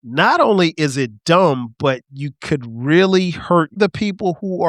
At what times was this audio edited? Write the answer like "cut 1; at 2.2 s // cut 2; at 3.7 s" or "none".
cut 1; at 3.8 s